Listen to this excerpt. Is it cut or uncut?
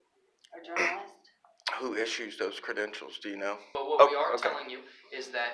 cut